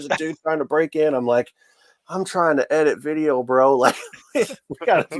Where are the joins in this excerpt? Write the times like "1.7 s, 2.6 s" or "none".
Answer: none